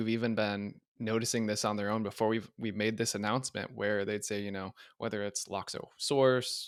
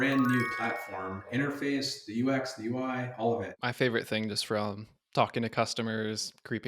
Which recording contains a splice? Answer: second; 2 cuts; at 1.3 s, 3.5 s

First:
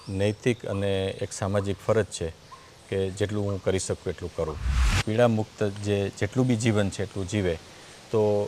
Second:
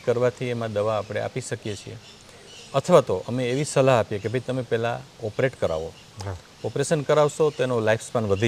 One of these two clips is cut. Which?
first; 1 cut; at 4.9 s

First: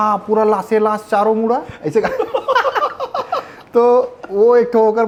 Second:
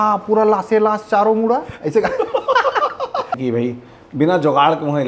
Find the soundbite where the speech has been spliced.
second; 1 cut; at 3.4 s

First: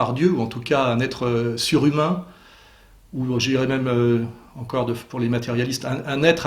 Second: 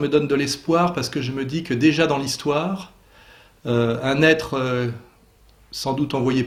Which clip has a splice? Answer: first; 1 cut; at 1.2 s

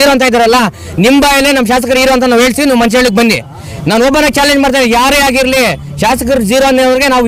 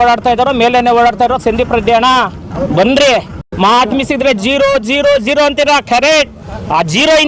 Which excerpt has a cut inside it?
second; 1 cut; at 3.4 s

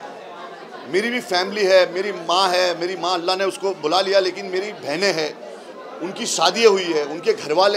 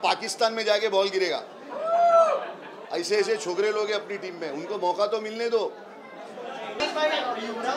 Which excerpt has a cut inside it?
second; 1 cut; at 6.8 s

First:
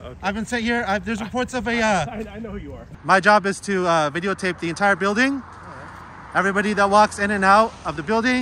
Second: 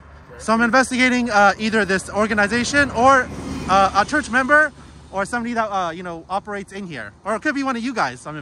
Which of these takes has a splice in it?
first; 1 cut; at 2.8 s

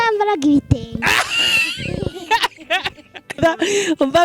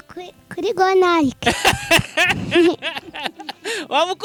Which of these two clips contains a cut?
first; 1 cut; at 3.4 s

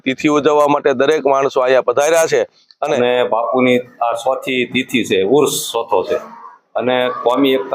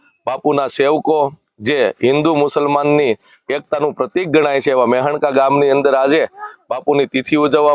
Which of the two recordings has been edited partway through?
first; 1 cut; at 2.8 s

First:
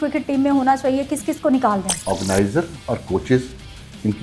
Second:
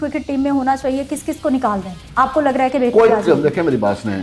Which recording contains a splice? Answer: first; 1 cut; at 1.9 s

